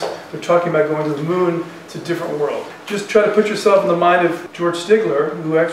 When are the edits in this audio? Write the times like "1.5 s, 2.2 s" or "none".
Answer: 2.8 s, 4.4 s